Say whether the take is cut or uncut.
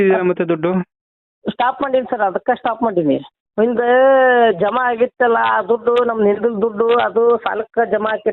cut